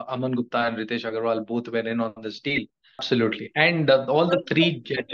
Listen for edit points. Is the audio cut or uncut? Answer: cut